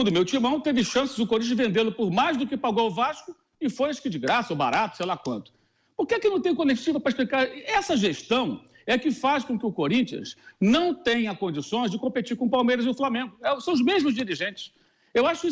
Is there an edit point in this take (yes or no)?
no